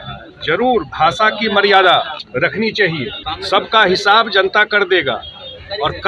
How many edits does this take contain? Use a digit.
2